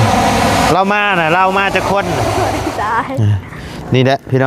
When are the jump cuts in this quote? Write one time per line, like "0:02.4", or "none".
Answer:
0:02.4